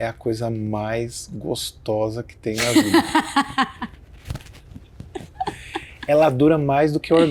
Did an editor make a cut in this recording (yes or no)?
no